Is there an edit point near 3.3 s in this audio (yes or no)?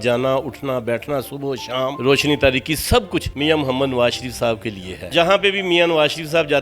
yes